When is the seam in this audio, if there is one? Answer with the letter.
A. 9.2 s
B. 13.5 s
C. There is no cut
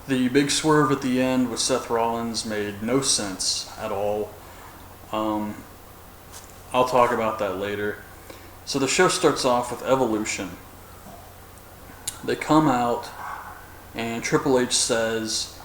A